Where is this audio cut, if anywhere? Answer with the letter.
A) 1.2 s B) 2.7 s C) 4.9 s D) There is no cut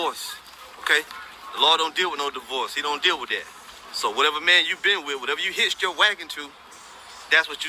C